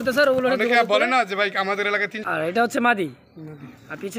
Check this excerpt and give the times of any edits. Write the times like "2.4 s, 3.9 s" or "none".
2.1 s